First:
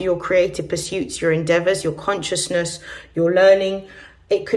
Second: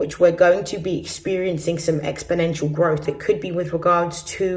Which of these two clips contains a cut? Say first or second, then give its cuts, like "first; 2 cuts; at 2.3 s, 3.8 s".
second; 1 cut; at 3.1 s